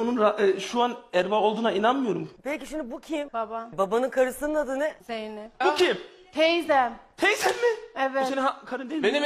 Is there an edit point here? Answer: yes; 1 cut; at 3.7 s

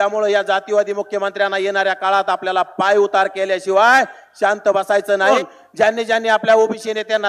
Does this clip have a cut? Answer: yes; 1 cut; at 5.3 s

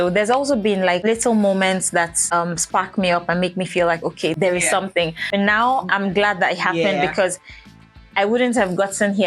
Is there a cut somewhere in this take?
yes; 4 cuts; at 1.0 s, 2.2 s, 4.3 s, 5.2 s

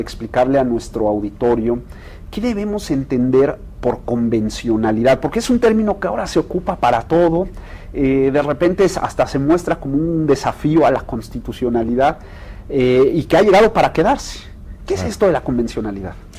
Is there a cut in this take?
no; 0 cuts

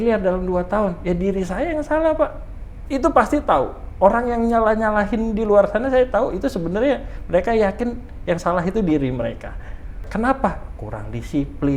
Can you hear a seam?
yes; 1 cut; at 10.0 s

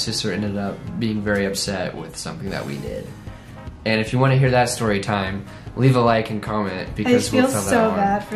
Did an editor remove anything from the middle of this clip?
no; 0 cuts

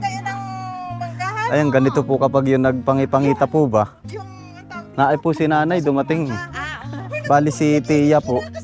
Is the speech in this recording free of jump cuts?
yes; 0 cuts

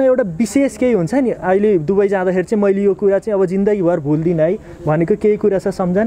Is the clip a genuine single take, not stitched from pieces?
yes; 0 cuts

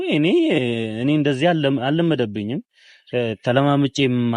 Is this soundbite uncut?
yes; 0 cuts

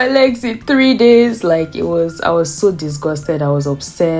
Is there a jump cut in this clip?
no; 0 cuts

